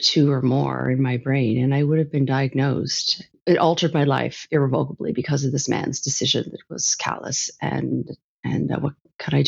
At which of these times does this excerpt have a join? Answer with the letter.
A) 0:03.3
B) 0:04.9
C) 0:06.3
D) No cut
A